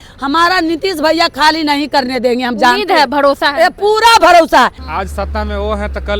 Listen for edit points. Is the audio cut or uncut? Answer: cut